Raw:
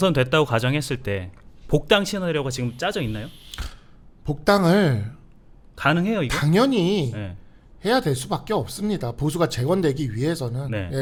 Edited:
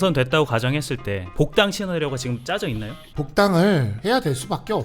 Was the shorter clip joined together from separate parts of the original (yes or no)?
yes